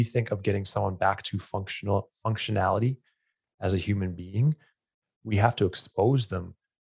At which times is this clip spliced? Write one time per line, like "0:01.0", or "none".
none